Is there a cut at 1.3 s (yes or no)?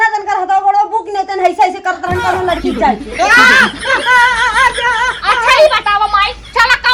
no